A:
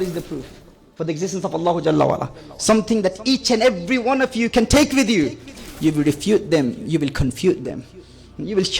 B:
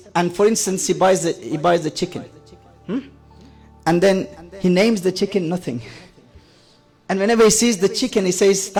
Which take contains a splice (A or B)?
A